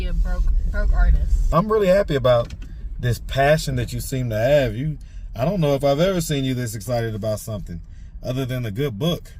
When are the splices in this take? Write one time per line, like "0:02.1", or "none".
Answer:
0:01.5